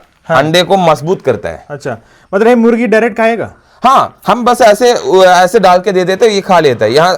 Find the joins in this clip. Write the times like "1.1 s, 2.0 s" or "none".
none